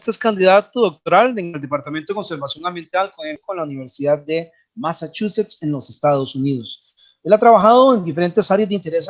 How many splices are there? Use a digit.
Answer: 1